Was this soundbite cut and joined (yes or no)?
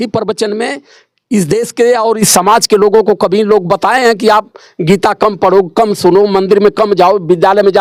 no